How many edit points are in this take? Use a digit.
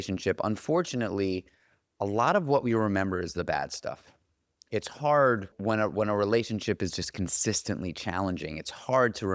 1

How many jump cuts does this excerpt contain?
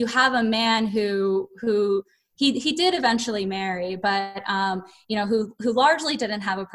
0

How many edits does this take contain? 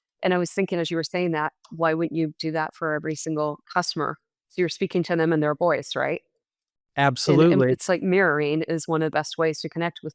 0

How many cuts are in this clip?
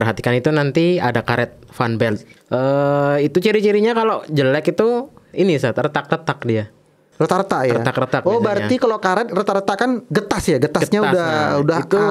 2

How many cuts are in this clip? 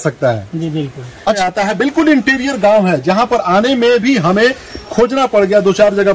1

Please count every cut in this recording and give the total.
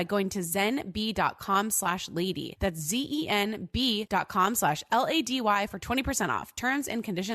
2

